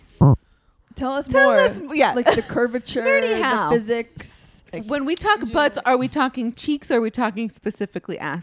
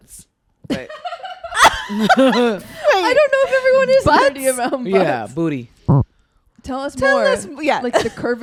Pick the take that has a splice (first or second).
first